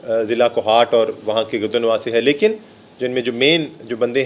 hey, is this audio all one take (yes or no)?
yes